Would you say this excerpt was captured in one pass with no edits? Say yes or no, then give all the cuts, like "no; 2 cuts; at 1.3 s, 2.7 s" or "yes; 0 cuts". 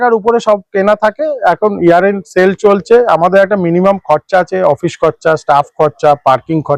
yes; 0 cuts